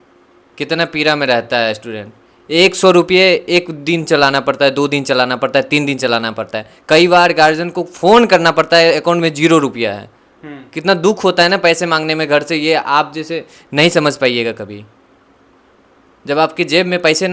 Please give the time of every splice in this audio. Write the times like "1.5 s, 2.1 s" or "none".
none